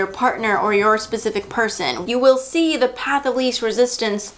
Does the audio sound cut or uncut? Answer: cut